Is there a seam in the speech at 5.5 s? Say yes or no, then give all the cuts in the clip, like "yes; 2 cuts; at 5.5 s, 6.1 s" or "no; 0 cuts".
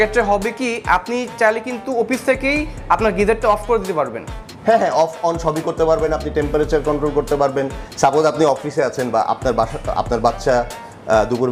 no; 0 cuts